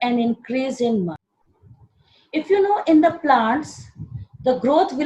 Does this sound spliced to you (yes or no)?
yes